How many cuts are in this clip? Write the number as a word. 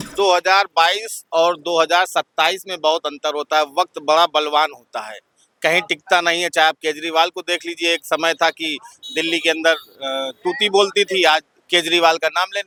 zero